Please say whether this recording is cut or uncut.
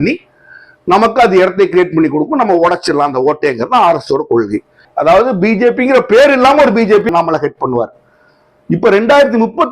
cut